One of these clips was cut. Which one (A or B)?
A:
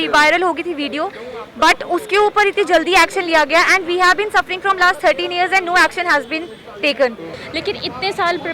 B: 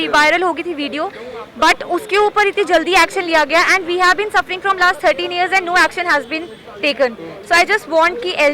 A